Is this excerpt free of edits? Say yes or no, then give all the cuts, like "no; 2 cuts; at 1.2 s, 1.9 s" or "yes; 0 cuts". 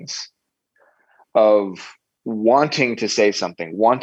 yes; 0 cuts